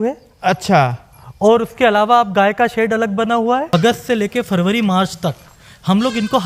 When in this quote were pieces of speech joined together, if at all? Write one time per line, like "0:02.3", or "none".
0:03.7

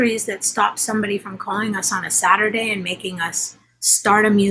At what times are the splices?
none

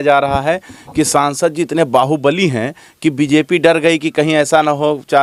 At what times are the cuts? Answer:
none

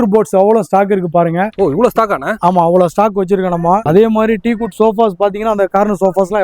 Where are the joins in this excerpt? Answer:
0:01.5
0:03.8

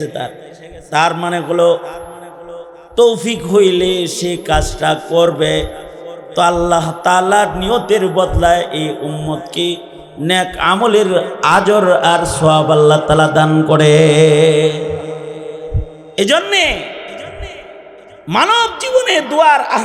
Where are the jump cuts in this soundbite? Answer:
none

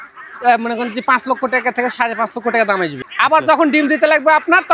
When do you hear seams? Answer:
0:03.1

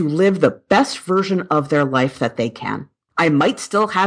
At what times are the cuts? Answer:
0:03.0

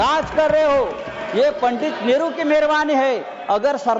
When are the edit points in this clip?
none

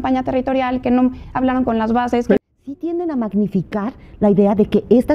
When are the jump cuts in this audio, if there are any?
0:02.4

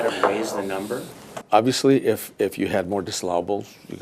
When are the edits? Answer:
0:01.4

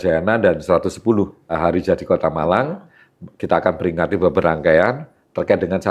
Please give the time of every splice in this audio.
0:01.6

